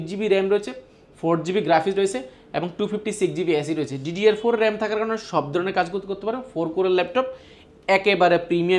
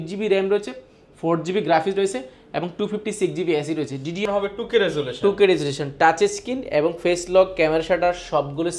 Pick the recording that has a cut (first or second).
second